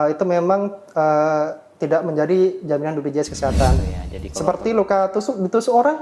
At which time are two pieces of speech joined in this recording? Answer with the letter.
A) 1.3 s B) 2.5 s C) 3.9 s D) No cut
C